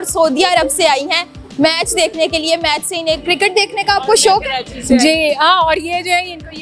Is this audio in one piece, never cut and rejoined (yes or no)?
yes